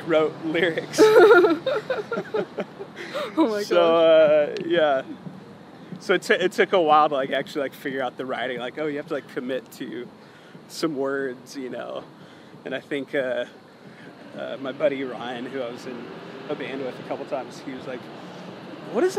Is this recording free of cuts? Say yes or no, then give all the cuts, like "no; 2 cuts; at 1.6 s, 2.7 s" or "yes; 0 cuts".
yes; 0 cuts